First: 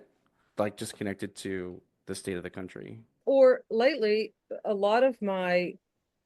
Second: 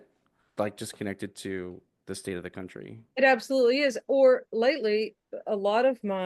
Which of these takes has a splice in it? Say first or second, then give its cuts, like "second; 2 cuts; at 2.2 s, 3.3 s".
first; 1 cut; at 3.1 s